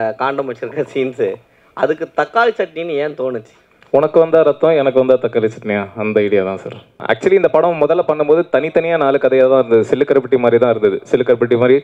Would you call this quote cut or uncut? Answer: cut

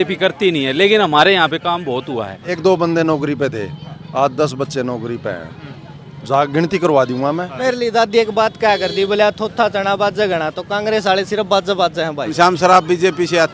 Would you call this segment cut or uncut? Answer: cut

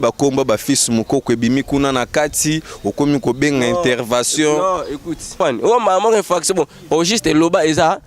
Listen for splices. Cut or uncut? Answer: cut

